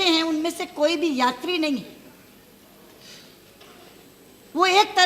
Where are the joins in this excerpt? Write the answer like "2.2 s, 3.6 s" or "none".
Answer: none